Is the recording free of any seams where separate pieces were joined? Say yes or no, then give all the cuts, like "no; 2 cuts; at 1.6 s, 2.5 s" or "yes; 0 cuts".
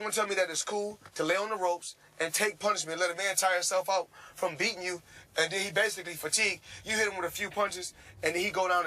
no; 1 cut; at 7.4 s